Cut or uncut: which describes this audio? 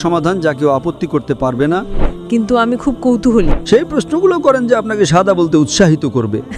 cut